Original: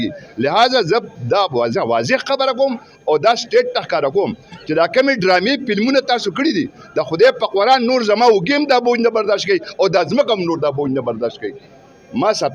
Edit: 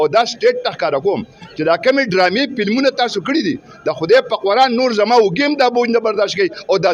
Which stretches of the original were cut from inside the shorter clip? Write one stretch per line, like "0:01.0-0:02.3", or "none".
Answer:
none